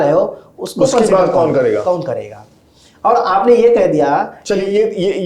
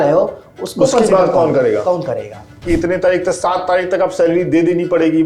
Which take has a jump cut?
second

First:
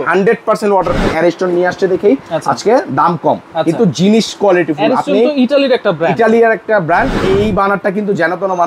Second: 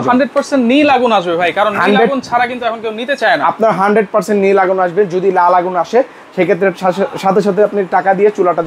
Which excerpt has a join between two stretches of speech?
first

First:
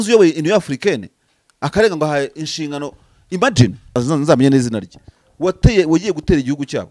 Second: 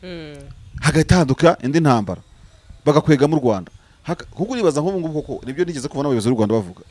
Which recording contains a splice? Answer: first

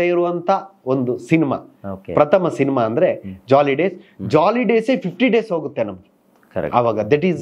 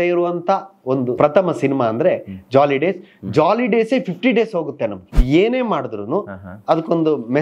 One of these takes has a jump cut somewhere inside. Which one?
second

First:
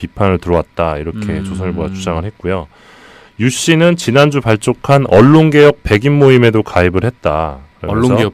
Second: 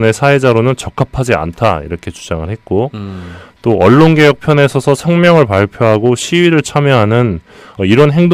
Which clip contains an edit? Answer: second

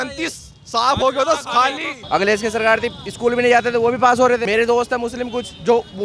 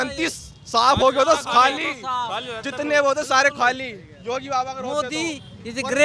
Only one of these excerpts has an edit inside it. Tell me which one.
first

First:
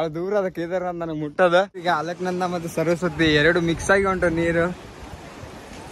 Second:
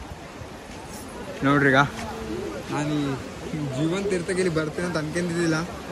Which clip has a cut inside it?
first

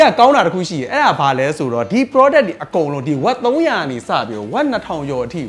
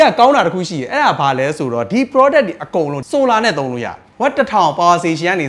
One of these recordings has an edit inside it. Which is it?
second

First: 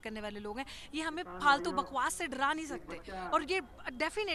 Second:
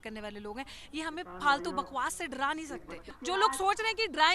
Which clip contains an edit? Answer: second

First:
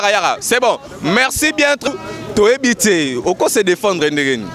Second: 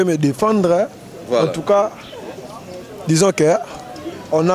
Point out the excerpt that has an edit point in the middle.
first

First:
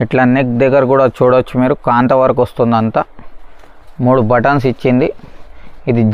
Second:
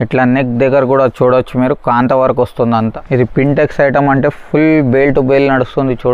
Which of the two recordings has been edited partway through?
second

